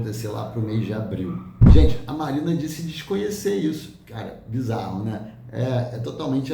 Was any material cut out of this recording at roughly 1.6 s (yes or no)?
yes